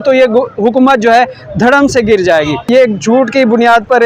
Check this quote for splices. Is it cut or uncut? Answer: cut